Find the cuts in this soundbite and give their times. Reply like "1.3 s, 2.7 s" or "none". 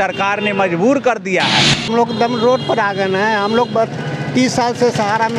1.9 s